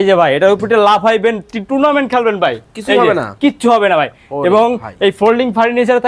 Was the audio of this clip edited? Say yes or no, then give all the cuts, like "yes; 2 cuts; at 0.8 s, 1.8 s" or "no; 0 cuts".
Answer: no; 0 cuts